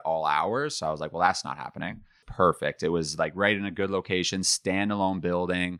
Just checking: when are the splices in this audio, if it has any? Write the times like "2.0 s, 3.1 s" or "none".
2.2 s